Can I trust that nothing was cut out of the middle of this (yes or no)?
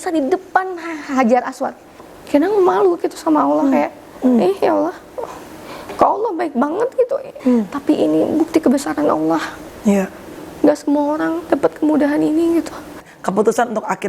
no